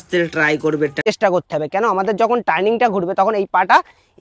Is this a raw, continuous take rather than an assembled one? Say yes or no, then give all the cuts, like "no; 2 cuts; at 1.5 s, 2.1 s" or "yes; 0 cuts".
no; 1 cut; at 1.0 s